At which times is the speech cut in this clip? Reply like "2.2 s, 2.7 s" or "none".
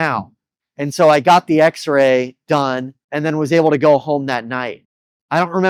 none